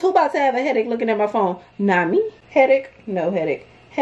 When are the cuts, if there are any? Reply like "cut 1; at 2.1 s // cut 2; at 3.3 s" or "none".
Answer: cut 1; at 2.4 s